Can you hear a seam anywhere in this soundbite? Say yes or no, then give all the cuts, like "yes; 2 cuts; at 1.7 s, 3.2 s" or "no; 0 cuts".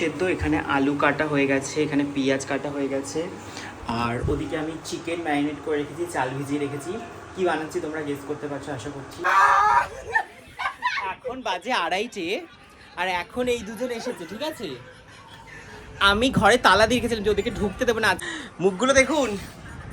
yes; 2 cuts; at 9.2 s, 18.2 s